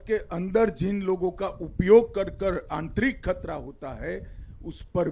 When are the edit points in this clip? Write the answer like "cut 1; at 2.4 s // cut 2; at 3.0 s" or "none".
none